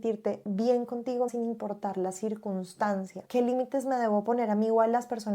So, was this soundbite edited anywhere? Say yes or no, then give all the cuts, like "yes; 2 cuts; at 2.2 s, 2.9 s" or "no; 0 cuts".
yes; 2 cuts; at 1.3 s, 3.2 s